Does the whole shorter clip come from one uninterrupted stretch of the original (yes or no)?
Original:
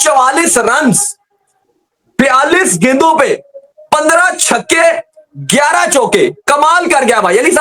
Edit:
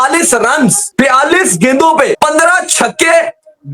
no